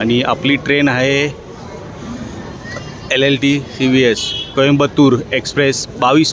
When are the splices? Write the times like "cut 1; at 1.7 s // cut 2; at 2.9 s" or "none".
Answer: none